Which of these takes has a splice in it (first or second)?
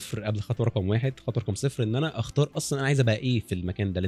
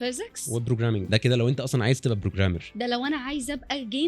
second